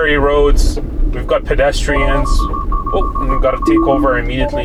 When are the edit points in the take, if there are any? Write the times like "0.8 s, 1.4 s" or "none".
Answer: none